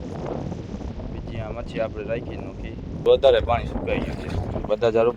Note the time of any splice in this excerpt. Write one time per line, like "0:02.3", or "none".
0:03.0